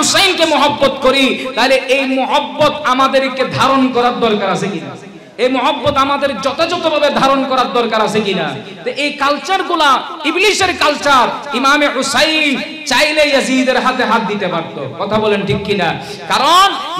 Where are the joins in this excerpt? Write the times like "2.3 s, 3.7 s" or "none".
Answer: none